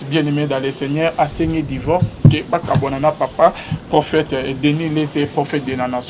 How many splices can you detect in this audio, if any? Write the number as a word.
zero